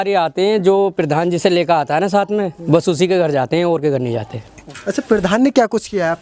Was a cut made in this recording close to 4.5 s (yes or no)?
yes